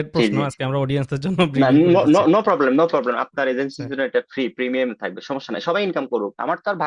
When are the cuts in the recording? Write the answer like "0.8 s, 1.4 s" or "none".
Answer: none